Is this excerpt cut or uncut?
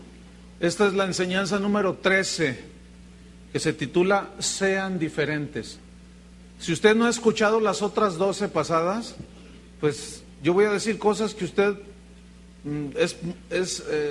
uncut